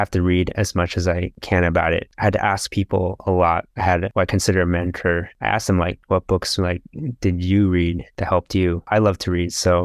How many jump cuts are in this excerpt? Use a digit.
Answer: 1